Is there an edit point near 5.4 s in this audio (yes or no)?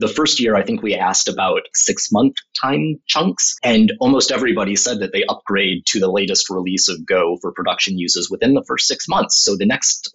no